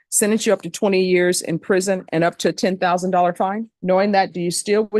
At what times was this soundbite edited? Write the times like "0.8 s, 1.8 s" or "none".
3.7 s